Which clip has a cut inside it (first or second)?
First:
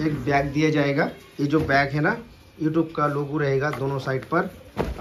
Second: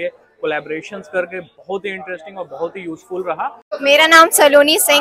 second